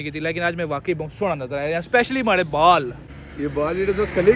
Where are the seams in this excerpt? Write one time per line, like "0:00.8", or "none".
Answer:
0:03.0